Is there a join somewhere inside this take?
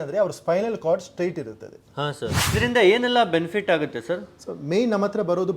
yes; 1 cut; at 2.5 s

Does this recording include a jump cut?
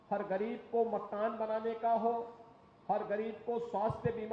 no; 0 cuts

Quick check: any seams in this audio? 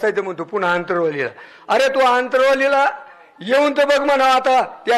no; 0 cuts

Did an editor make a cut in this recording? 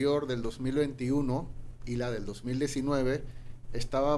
no; 0 cuts

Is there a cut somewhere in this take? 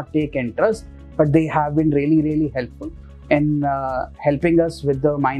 no; 0 cuts

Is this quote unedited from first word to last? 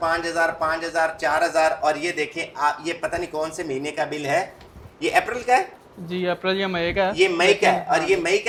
yes; 0 cuts

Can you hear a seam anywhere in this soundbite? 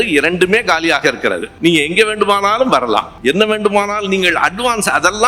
yes; 2 cuts; at 1.5 s, 3.1 s

